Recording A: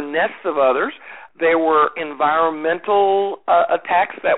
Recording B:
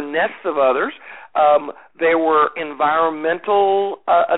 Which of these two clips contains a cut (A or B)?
A